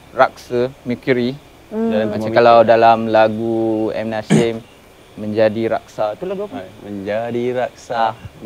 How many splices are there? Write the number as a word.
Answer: zero